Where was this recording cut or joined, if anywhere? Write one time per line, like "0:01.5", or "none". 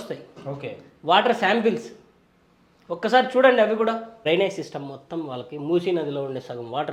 0:04.2